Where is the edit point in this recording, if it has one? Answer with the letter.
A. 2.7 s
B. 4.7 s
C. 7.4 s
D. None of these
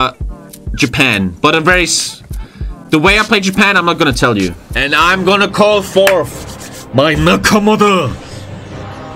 B